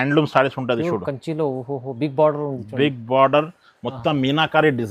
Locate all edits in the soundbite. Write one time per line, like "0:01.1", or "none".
none